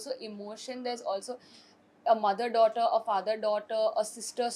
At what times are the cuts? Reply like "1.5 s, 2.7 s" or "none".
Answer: none